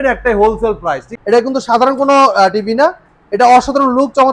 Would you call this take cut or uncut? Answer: cut